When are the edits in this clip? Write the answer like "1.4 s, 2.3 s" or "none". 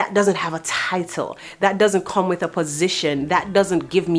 none

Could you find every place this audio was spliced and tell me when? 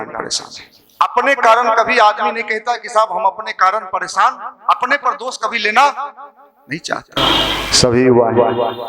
7.0 s

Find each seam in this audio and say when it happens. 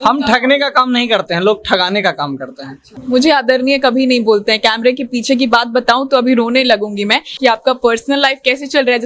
2.9 s, 7.3 s

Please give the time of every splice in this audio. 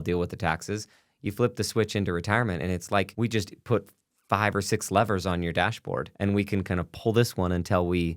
3.1 s, 6.1 s

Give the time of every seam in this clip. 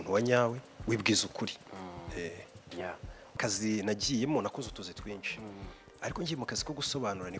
3.4 s

